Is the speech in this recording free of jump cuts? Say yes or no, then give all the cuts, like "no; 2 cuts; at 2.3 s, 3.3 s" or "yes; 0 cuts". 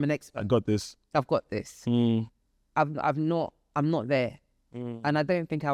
yes; 0 cuts